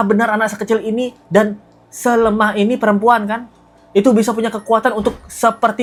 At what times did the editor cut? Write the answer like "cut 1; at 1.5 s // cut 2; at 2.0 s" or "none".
none